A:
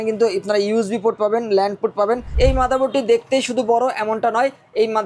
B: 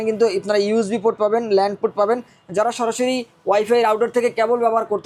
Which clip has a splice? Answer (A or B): A